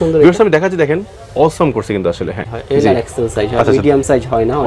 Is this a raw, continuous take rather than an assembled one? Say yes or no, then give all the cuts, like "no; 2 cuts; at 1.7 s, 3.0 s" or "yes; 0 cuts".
no; 1 cut; at 2.5 s